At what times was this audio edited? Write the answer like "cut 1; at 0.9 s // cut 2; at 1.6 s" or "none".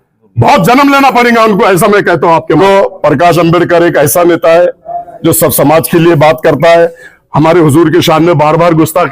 cut 1; at 2.6 s